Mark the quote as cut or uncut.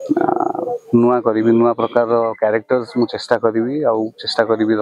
uncut